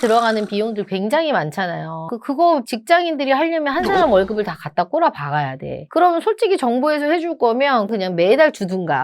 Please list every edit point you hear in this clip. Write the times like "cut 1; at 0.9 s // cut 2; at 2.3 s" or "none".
cut 1; at 2.1 s // cut 2; at 7.9 s